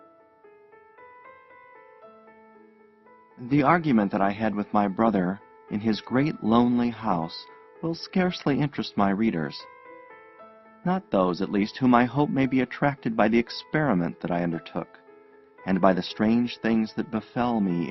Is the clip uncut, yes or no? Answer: no